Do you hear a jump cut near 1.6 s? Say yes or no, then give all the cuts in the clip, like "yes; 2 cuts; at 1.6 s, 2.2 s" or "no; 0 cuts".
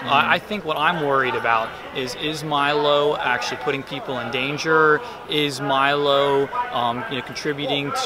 no; 1 cut; at 3.9 s